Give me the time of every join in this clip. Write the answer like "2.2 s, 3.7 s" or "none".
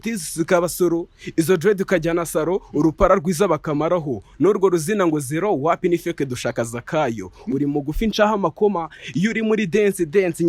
none